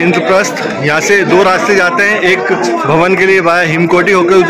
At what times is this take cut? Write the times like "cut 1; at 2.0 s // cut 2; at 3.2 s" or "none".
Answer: none